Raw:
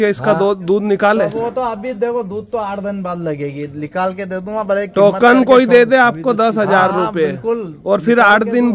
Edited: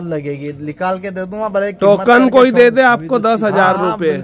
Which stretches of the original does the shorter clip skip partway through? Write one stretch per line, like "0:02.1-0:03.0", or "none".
none